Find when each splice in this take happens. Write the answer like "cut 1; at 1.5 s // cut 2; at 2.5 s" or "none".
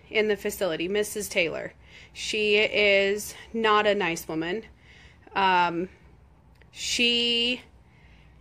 cut 1; at 4.3 s